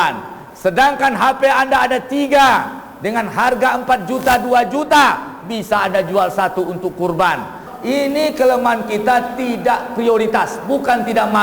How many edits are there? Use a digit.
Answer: 1